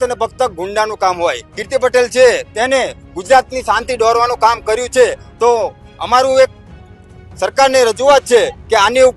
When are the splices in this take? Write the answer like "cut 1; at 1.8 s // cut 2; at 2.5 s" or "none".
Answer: cut 1; at 1.5 s